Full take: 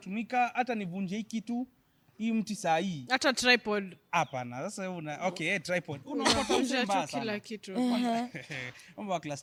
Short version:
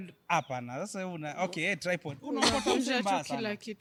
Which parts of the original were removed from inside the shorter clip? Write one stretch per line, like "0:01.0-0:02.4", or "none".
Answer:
none